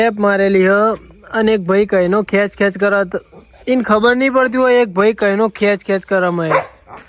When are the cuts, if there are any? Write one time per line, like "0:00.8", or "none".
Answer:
none